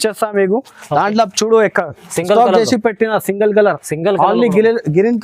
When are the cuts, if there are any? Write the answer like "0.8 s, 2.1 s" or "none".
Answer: none